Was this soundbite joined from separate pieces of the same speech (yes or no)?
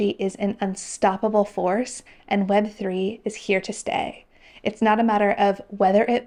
no